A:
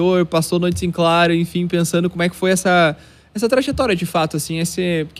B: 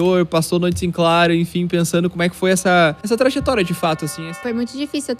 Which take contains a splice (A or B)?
B